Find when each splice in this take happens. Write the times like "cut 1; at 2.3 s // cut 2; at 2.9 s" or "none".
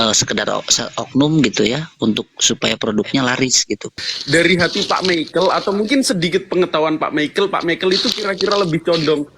cut 1; at 3.9 s